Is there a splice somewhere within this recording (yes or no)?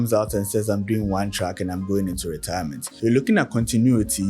yes